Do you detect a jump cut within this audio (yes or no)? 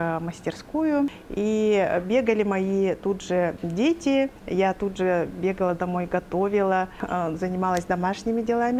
yes